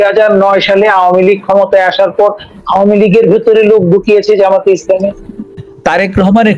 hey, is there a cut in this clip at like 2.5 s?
no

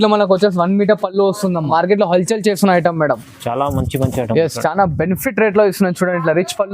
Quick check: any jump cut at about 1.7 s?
yes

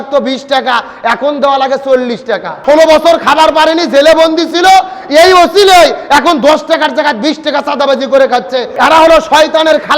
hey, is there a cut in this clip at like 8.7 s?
yes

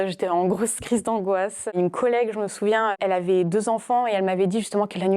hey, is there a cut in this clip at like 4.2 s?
no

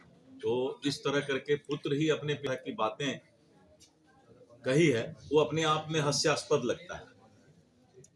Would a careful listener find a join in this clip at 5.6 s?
no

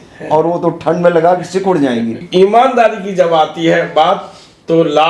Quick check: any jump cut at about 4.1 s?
no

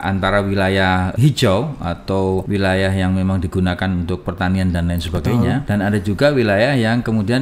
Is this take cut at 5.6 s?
yes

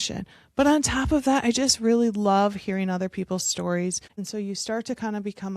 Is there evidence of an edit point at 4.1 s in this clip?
yes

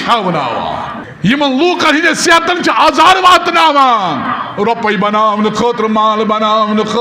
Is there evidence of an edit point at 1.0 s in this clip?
yes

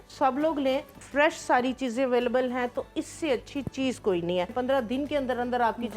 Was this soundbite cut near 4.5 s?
yes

